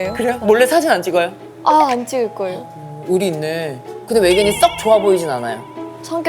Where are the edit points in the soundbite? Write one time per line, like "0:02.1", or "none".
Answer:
0:03.8